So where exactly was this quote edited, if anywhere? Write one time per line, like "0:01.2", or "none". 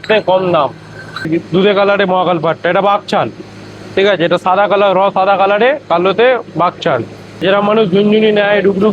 0:01.3
0:07.4